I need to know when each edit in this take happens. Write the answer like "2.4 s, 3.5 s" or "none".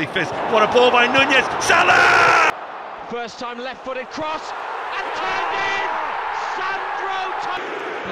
2.5 s